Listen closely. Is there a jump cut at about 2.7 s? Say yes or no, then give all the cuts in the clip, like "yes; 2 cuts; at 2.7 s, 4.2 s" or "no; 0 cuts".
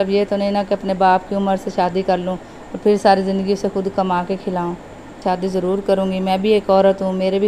no; 1 cut; at 5.2 s